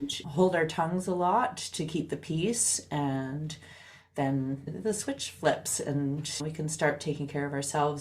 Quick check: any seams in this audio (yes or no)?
yes